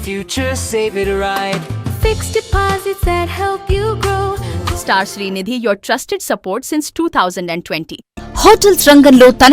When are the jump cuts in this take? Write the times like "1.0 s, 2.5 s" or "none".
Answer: 4.5 s, 8.0 s